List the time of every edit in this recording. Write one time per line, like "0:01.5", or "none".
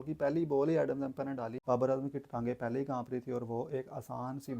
0:01.5

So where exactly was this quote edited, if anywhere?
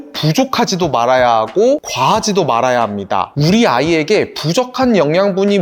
0:03.3

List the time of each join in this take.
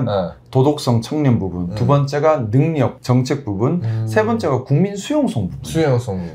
none

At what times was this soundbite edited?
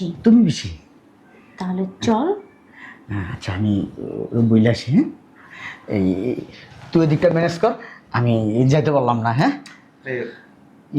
none

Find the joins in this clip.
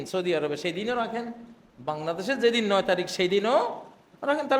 none

